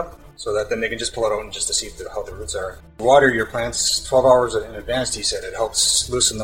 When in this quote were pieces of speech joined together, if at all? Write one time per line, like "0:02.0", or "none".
0:02.8